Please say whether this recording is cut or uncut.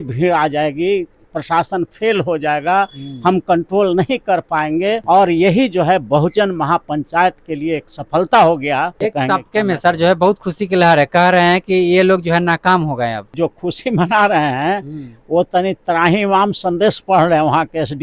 cut